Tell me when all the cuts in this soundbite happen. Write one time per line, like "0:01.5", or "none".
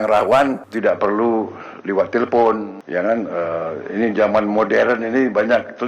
none